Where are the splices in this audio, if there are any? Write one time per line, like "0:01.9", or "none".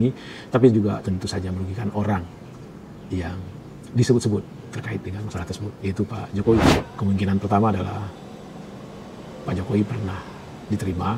0:06.8

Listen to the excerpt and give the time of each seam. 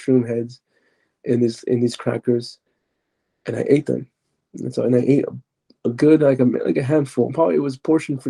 0:07.3

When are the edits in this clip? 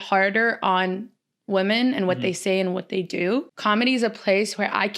0:03.5

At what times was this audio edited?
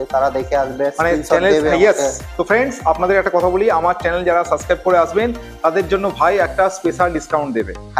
none

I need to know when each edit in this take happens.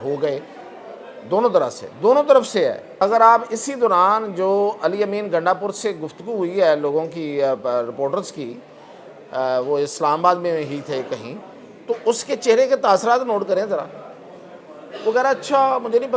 0:03.0

